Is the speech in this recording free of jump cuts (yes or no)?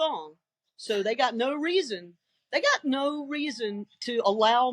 yes